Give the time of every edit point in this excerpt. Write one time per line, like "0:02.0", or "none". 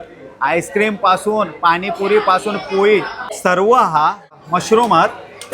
0:03.2
0:04.4